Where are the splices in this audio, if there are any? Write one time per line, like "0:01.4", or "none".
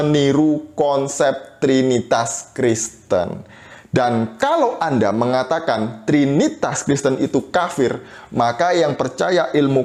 none